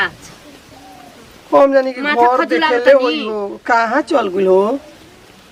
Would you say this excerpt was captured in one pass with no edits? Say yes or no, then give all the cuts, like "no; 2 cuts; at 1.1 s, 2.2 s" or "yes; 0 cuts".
yes; 0 cuts